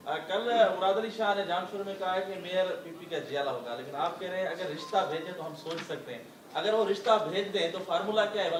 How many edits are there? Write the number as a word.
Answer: zero